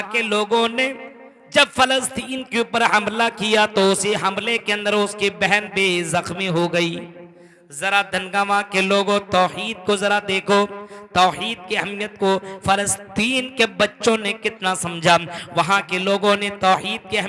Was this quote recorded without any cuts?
yes; 0 cuts

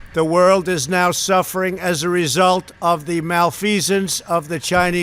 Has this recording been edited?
no; 0 cuts

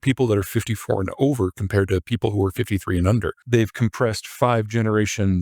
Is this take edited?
yes; 1 cut; at 3.4 s

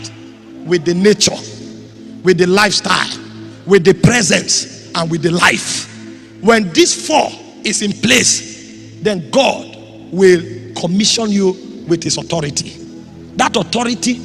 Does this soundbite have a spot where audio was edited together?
no; 0 cuts

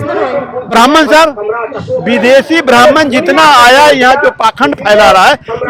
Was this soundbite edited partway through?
no; 0 cuts

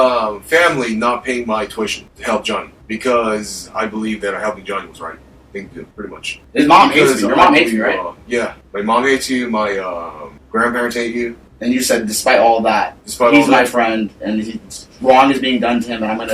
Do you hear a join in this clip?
no; 0 cuts

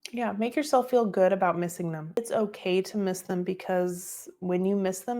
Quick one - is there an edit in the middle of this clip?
yes; 1 cut; at 2.2 s

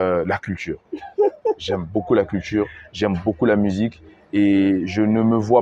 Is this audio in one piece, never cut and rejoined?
yes; 0 cuts

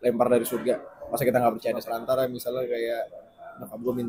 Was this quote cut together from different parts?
yes; 1 cut; at 2.0 s

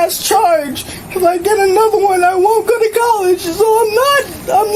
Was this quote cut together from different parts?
no; 0 cuts

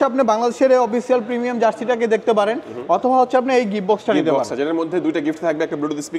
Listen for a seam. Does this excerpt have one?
no; 0 cuts

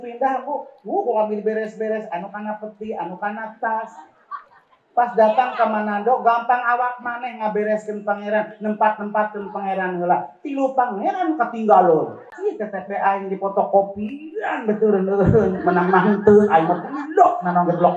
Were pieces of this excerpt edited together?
yes; 1 cut; at 12.3 s

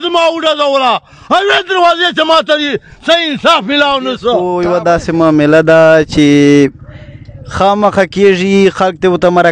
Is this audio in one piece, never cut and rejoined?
no; 1 cut; at 4.5 s

